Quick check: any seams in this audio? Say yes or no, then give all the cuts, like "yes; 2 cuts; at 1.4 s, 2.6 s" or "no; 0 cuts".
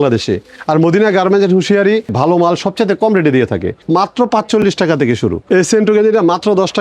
yes; 3 cuts; at 2.1 s, 3.8 s, 5.4 s